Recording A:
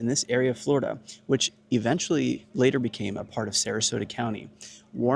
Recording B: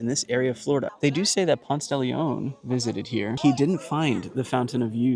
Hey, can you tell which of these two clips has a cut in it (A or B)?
B